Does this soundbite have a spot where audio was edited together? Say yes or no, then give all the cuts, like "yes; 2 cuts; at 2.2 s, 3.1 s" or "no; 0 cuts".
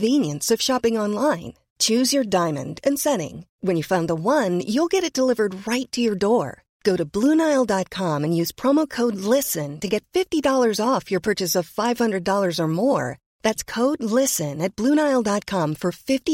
no; 0 cuts